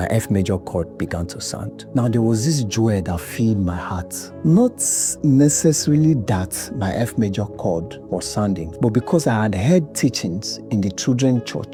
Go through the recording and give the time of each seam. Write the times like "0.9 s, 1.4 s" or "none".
none